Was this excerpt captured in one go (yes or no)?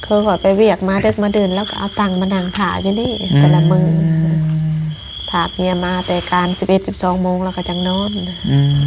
yes